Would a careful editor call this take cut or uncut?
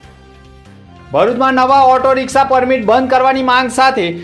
cut